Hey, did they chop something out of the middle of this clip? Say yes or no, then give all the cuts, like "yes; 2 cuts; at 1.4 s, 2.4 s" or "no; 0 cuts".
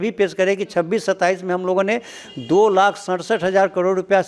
no; 0 cuts